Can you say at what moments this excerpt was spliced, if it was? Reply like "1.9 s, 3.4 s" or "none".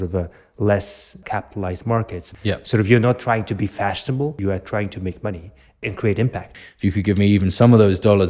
1.2 s, 2.3 s, 4.4 s, 5.8 s, 6.6 s